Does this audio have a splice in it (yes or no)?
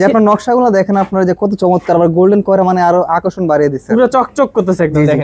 no